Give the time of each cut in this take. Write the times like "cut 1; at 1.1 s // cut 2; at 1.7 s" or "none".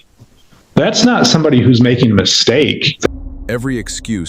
cut 1; at 3.1 s